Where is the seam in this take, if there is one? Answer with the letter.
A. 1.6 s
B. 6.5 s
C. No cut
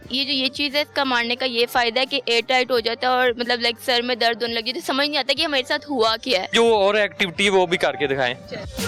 C